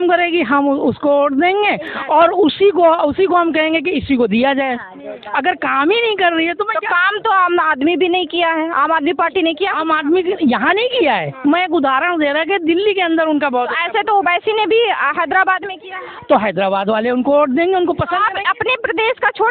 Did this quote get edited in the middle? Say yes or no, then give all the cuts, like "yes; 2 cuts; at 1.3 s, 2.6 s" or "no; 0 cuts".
no; 0 cuts